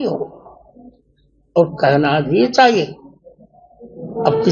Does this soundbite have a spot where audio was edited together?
no; 0 cuts

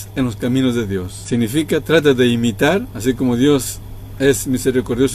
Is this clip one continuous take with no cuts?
no; 2 cuts; at 1.1 s, 2.9 s

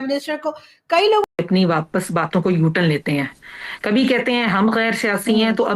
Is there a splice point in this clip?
yes; 1 cut; at 1.2 s

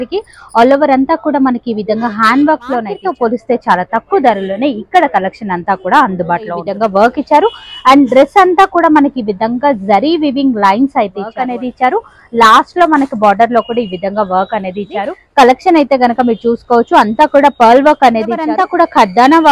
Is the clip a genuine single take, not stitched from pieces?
no; 5 cuts; at 3.0 s, 6.7 s, 11.4 s, 15.2 s, 18.5 s

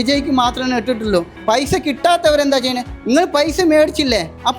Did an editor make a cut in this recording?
yes; 1 cut; at 1.3 s

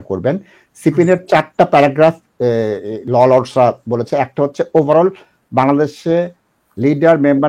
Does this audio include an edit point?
no; 0 cuts

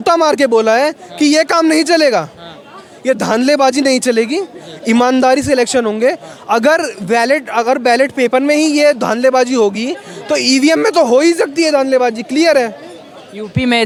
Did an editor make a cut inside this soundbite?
no; 0 cuts

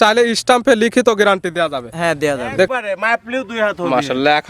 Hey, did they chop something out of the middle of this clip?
yes; 1 cut; at 2.7 s

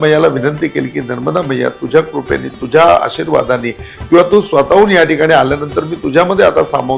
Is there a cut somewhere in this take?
no; 0 cuts

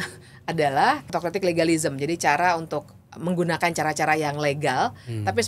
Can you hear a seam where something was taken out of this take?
yes; 1 cut; at 1.0 s

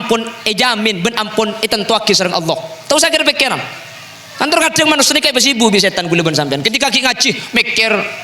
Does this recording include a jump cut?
no; 0 cuts

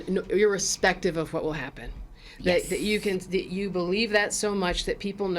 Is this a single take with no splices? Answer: yes; 0 cuts

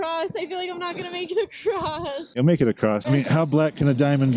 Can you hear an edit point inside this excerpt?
yes; 1 cut; at 3.0 s

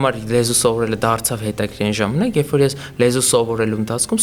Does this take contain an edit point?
no; 0 cuts

